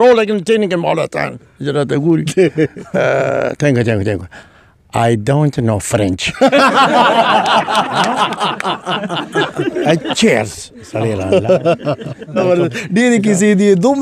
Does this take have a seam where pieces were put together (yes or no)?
yes